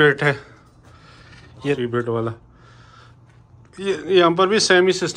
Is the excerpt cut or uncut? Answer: cut